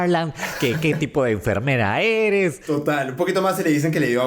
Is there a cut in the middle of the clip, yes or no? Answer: yes